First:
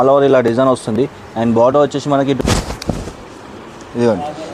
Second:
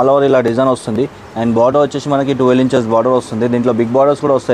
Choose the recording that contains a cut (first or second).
first